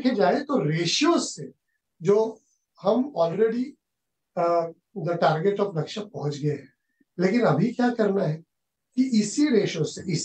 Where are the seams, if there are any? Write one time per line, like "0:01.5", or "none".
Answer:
0:04.8